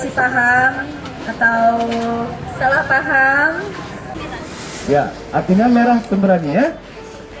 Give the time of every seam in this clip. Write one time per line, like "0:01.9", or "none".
0:04.1